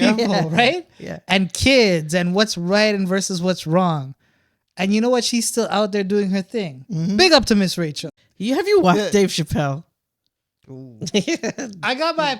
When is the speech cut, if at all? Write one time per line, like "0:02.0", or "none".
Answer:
0:08.0